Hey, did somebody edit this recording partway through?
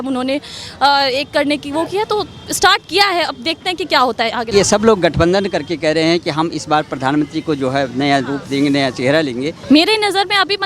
yes; 2 cuts; at 4.5 s, 9.6 s

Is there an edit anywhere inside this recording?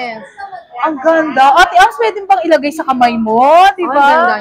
no; 0 cuts

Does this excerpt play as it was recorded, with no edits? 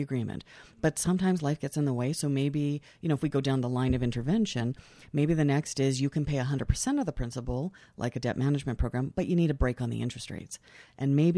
yes; 0 cuts

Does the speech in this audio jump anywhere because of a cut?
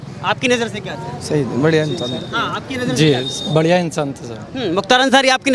no; 0 cuts

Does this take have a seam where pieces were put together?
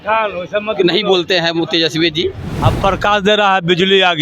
yes; 1 cut; at 2.4 s

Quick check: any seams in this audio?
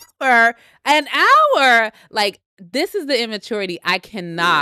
no; 0 cuts

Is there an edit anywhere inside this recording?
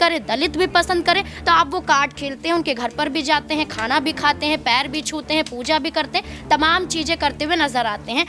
no; 0 cuts

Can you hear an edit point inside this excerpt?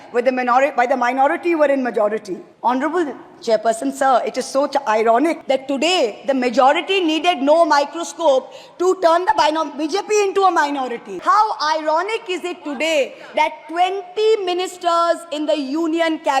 yes; 3 cuts; at 2.4 s, 5.4 s, 11.1 s

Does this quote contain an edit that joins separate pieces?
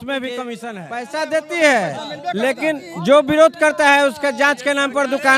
yes; 1 cut; at 1.2 s

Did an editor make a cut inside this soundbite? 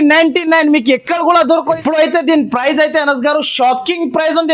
yes; 1 cut; at 1.7 s

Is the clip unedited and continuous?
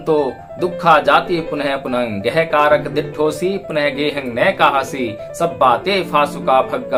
yes; 0 cuts

